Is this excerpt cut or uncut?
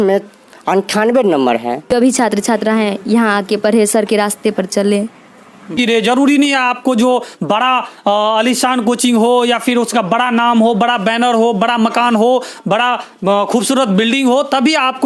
cut